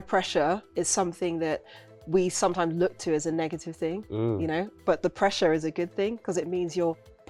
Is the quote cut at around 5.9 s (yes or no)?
no